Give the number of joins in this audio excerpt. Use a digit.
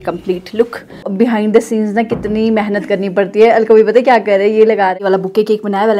2